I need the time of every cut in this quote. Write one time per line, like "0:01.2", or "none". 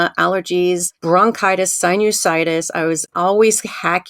0:00.9